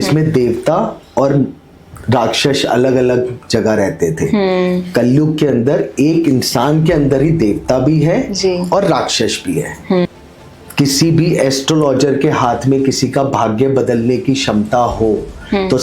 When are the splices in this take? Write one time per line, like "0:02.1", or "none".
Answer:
0:10.1